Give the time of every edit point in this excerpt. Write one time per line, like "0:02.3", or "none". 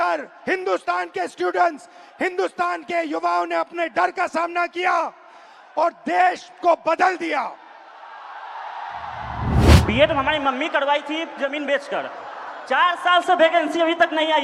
0:09.8